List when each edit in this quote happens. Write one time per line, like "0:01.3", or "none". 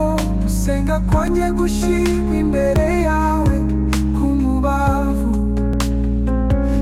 none